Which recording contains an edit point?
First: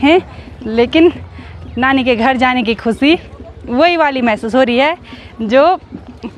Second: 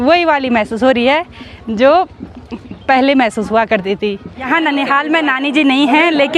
second; 1 cut; at 4.3 s

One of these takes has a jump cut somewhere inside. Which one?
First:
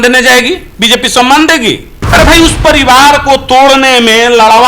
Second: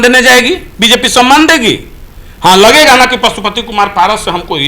first; 1 cut; at 1.9 s

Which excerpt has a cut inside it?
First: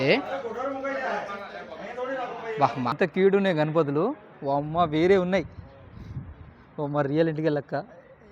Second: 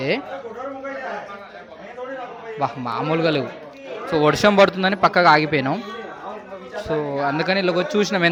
first; 1 cut; at 2.9 s

